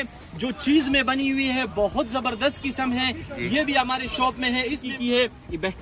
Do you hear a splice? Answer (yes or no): yes